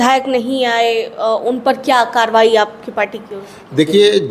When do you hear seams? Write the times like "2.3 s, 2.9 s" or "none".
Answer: none